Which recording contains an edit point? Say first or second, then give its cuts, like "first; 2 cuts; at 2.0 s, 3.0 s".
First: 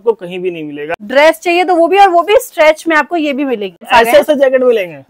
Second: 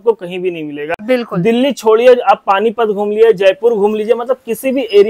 first; 2 cuts; at 0.9 s, 3.9 s